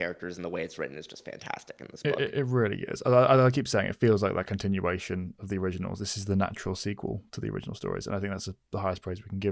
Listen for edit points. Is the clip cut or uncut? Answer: uncut